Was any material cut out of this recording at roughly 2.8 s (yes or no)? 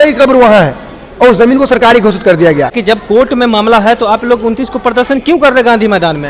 yes